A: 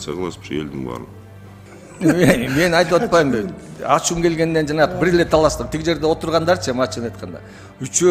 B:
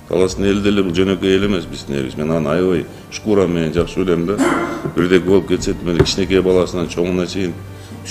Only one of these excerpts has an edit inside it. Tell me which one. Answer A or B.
A